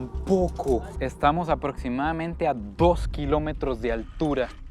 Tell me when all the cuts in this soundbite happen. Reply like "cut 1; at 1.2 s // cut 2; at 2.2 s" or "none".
cut 1; at 0.9 s

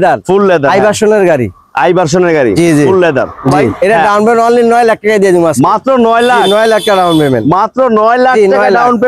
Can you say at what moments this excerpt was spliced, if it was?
cut 1; at 3.7 s

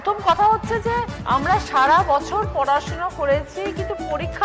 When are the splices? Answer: none

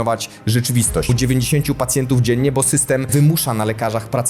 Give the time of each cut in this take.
cut 1; at 1.1 s // cut 2; at 3.1 s

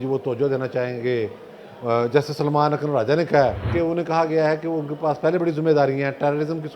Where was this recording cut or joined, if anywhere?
cut 1; at 3.6 s

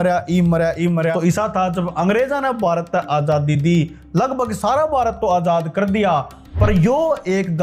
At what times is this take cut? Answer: cut 1; at 1.1 s

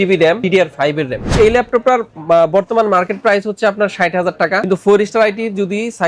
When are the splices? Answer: cut 1; at 1.2 s

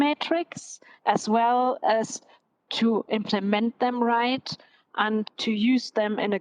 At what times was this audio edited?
cut 1; at 5.3 s

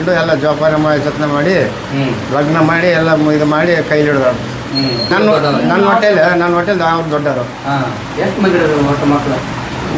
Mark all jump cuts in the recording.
cut 1; at 5.1 s

